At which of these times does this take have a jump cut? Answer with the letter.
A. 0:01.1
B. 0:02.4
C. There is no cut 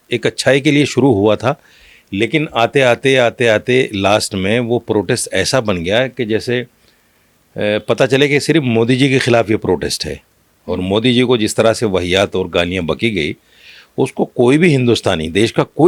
C